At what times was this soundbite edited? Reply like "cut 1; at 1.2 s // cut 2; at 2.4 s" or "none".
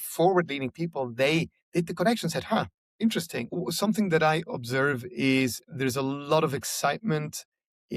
cut 1; at 3.5 s